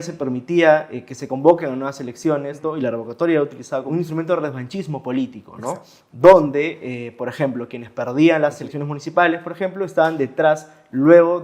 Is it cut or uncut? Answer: cut